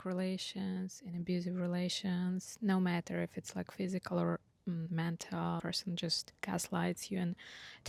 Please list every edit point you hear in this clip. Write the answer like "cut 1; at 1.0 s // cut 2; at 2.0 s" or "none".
none